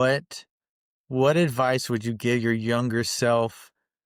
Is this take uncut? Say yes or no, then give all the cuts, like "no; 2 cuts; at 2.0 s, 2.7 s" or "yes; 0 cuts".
yes; 0 cuts